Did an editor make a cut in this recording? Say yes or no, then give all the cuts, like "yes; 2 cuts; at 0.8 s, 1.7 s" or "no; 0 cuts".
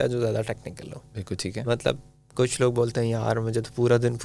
no; 0 cuts